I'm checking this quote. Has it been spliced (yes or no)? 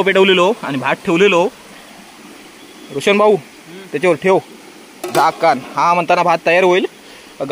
no